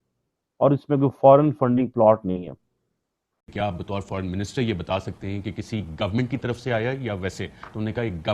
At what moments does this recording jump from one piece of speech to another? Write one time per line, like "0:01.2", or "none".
0:03.5